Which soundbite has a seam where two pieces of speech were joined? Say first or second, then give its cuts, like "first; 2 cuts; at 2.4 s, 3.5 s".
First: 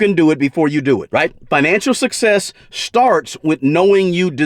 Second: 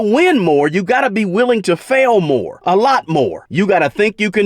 second; 2 cuts; at 2.5 s, 3.4 s